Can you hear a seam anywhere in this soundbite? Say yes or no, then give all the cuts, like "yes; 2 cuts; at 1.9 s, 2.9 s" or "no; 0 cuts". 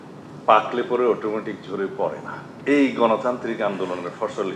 yes; 1 cut; at 2.4 s